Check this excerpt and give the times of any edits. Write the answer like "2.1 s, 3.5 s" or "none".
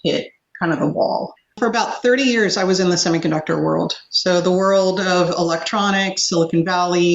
1.5 s